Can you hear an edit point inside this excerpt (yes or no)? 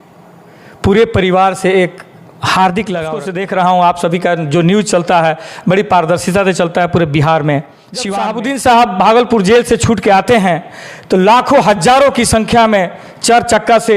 yes